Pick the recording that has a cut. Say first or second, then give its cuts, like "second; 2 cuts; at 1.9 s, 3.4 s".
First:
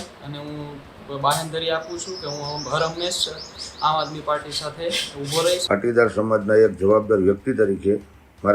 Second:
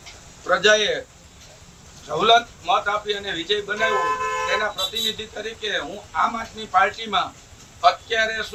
first; 1 cut; at 5.6 s